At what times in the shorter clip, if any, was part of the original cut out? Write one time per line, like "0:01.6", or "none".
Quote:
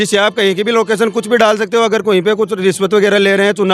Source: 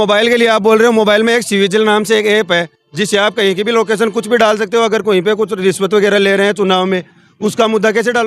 none